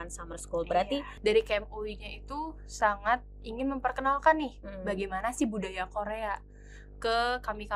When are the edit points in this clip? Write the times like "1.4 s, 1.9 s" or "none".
1.1 s